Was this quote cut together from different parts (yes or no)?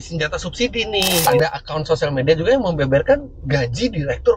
yes